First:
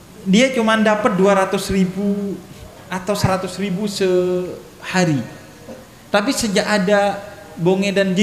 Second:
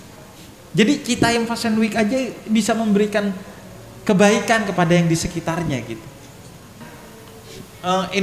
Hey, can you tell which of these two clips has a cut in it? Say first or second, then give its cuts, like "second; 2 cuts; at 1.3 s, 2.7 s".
second; 1 cut; at 6.8 s